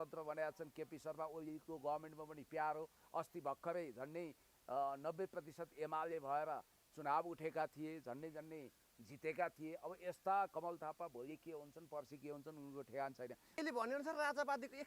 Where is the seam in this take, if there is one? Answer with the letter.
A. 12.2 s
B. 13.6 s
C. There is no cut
B